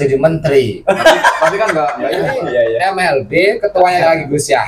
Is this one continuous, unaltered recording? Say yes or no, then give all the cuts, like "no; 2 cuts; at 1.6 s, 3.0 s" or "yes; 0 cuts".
no; 1 cut; at 2.0 s